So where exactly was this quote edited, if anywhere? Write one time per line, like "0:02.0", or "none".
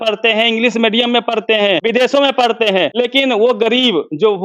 0:01.8
0:02.9

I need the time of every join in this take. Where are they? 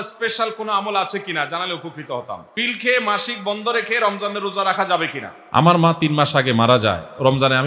0:02.5
0:05.6

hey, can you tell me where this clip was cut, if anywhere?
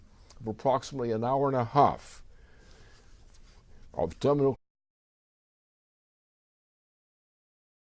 none

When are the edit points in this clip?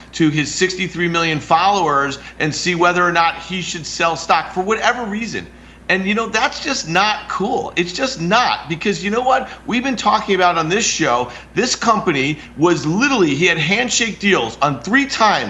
none

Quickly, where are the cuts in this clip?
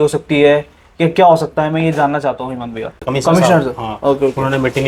0:03.0

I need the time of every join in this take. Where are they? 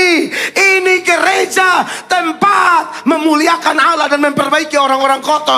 none

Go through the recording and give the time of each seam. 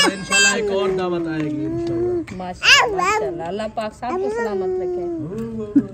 0:02.6

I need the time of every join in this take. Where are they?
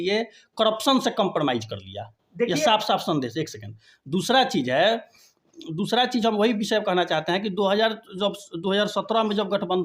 none

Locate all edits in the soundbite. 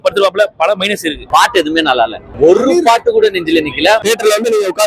0:01.2
0:02.2
0:04.0

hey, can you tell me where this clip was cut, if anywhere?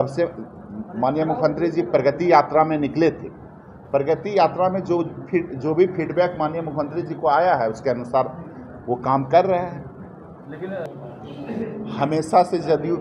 0:10.8

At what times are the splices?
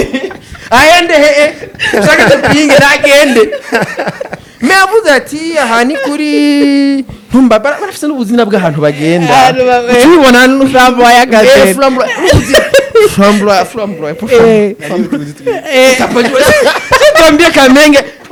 none

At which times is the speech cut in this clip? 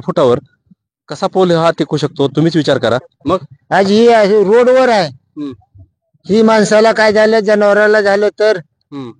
0:03.1

